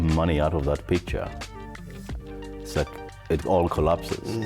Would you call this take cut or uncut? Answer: uncut